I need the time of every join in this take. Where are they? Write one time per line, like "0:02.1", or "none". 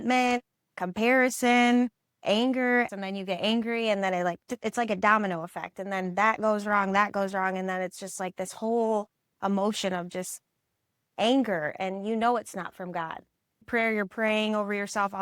0:02.2
0:02.9
0:13.7

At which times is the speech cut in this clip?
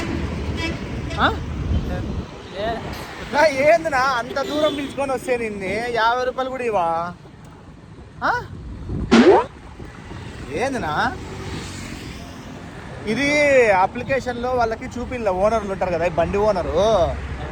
none

